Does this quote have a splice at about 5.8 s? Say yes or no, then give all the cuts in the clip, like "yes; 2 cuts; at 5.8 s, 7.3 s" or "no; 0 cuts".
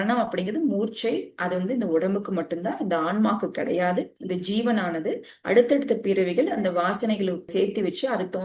no; 0 cuts